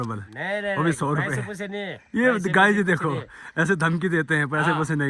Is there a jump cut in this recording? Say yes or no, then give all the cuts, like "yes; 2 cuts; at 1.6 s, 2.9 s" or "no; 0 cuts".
no; 0 cuts